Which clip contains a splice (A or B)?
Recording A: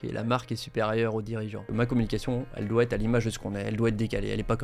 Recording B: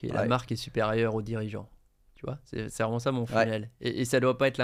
A